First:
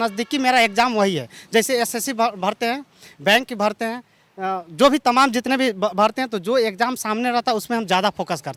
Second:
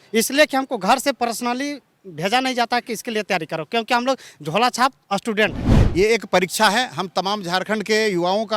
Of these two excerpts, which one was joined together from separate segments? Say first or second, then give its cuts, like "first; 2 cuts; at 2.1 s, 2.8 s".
second; 1 cut; at 5.7 s